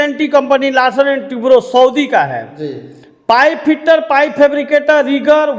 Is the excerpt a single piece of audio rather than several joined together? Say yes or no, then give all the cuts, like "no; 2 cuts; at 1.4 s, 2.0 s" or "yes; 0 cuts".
yes; 0 cuts